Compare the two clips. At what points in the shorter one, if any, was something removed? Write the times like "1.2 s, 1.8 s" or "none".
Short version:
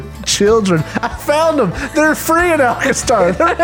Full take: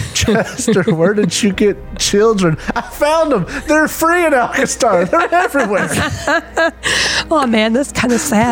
none